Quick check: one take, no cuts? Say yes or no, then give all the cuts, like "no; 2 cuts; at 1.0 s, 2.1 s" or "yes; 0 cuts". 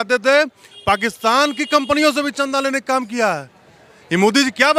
yes; 0 cuts